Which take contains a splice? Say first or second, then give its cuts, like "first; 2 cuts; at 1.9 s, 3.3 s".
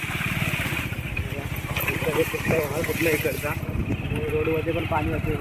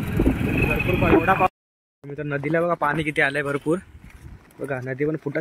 second; 1 cut; at 1.5 s